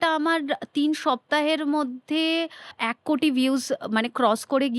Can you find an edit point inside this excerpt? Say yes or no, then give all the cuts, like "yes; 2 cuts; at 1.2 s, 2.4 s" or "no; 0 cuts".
yes; 1 cut; at 2.8 s